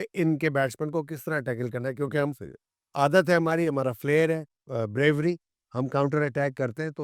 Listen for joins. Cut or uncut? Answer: uncut